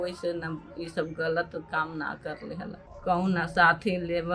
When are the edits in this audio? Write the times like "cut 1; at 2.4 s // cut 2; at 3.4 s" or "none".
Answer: cut 1; at 2.9 s